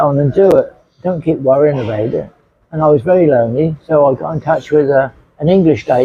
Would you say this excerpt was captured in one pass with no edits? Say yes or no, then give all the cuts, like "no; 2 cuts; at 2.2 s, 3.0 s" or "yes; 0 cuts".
yes; 0 cuts